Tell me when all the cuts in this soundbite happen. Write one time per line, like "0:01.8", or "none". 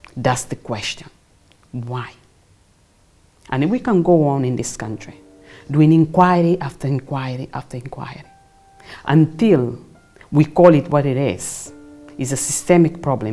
none